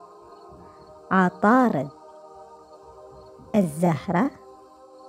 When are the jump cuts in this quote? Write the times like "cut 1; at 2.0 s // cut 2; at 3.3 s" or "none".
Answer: cut 1; at 1.0 s // cut 2; at 1.9 s // cut 3; at 3.2 s // cut 4; at 4.4 s